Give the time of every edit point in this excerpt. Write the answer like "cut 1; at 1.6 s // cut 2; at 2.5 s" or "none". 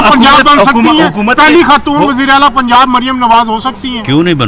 none

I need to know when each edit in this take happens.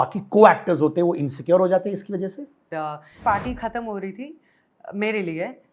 cut 1; at 3.0 s

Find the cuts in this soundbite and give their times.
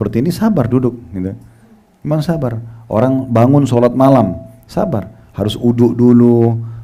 none

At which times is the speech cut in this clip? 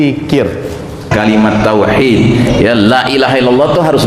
cut 1; at 1.1 s

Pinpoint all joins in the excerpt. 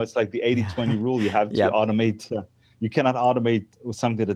none

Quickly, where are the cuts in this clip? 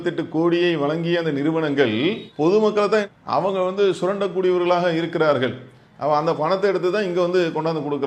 none

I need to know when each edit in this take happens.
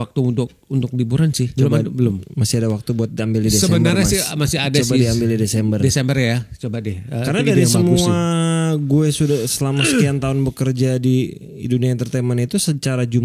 cut 1; at 1.5 s

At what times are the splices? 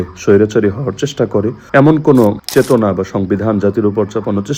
cut 1; at 1.6 s // cut 2; at 2.4 s

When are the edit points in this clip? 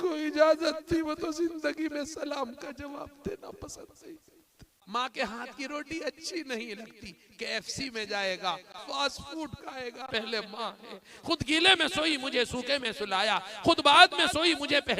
cut 1; at 4.7 s // cut 2; at 8.8 s // cut 3; at 10.1 s

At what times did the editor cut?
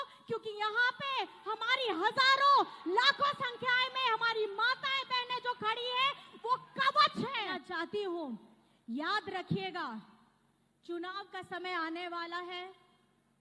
cut 1; at 7.6 s

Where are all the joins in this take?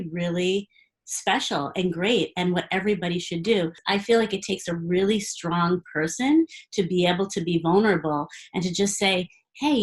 cut 1; at 3.8 s

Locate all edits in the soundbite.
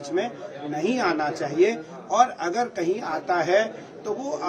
none

